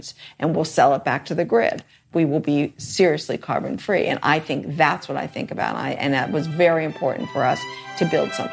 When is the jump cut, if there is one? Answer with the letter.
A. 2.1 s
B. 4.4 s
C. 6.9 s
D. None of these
A